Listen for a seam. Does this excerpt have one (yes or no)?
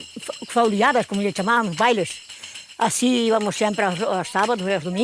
no